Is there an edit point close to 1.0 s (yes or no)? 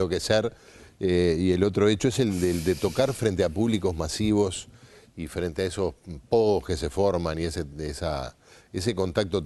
no